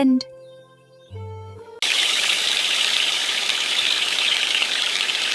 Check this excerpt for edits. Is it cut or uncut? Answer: cut